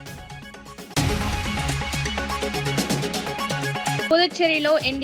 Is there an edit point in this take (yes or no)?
yes